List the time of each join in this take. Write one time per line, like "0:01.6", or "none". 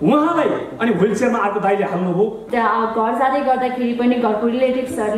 0:02.4